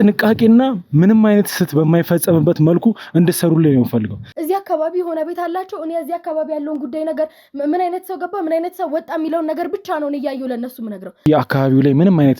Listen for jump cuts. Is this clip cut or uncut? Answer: cut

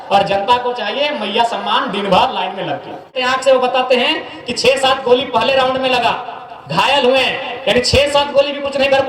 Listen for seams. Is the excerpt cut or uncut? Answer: cut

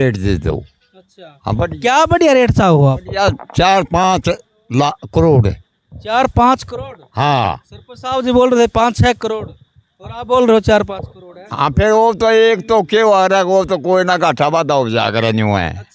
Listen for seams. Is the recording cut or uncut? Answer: uncut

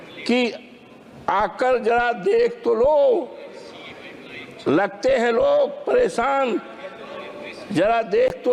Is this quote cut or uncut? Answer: uncut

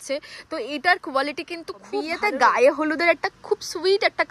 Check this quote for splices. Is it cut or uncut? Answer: cut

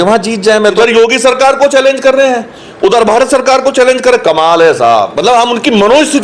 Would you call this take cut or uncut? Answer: cut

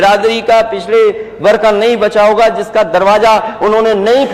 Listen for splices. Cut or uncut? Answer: uncut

